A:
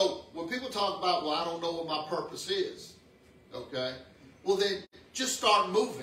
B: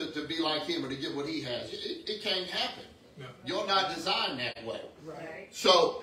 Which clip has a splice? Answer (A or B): B